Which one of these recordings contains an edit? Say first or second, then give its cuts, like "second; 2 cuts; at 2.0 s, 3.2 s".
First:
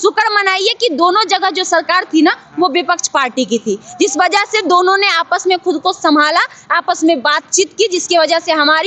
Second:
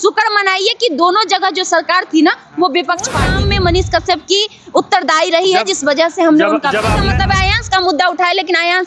second; 2 cuts; at 3.3 s, 7.0 s